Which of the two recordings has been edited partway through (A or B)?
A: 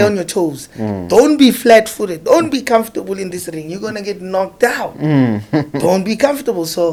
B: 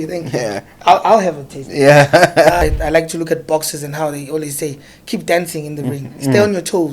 B